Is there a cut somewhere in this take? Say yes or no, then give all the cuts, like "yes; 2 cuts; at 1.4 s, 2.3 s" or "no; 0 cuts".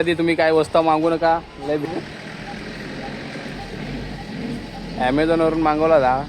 yes; 1 cut; at 1.7 s